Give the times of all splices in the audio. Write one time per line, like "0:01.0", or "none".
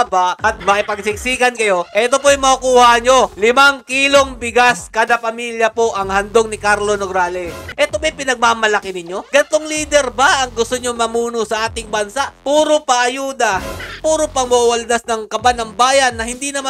0:07.6
0:13.9